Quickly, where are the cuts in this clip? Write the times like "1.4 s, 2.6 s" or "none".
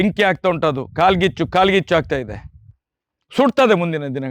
none